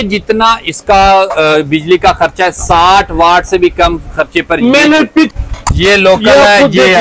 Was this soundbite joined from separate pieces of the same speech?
yes; 1 cut; at 5.3 s

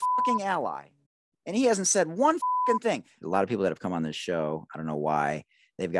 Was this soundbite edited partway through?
yes; 1 cut; at 3.1 s

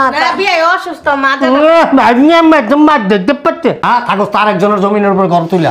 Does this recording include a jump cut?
yes; 1 cut; at 3.8 s

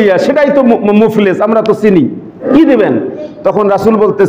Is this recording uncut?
no; 1 cut; at 2.4 s

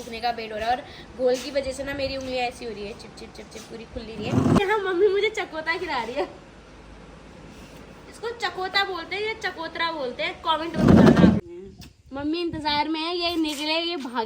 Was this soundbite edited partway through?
yes; 2 cuts; at 4.6 s, 11.4 s

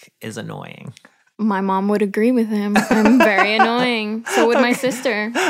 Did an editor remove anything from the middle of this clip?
no; 0 cuts

